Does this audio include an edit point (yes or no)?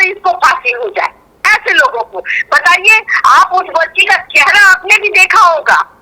no